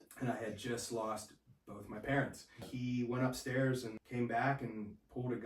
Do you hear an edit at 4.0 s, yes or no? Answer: yes